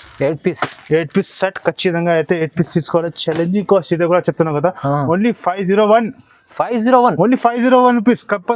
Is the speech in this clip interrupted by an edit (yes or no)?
no